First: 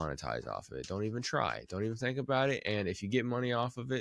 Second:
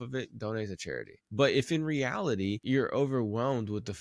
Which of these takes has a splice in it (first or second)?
second